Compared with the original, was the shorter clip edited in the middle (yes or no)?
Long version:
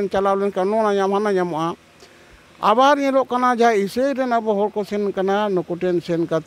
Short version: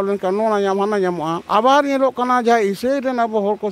yes